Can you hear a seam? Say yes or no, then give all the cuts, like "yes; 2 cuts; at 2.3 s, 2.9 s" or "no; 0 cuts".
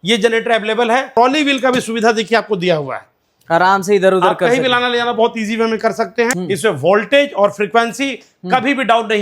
yes; 2 cuts; at 1.1 s, 6.3 s